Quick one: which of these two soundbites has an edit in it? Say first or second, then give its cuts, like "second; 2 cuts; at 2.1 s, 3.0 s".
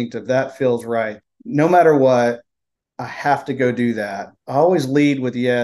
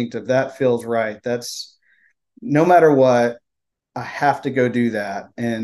first; 2 cuts; at 1.2 s, 4.3 s